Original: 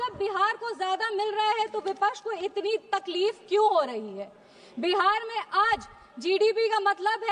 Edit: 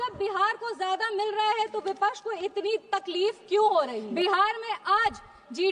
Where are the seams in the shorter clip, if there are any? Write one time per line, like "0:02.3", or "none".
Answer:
0:04.0